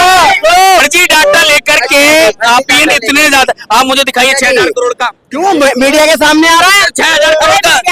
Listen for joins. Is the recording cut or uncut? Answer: cut